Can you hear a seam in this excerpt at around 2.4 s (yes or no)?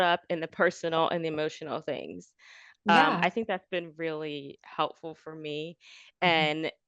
no